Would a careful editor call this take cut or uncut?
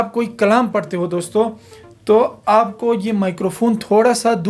uncut